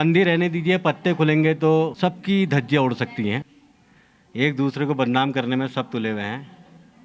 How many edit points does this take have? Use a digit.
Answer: 1